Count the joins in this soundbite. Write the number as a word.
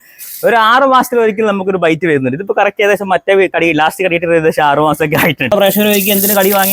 one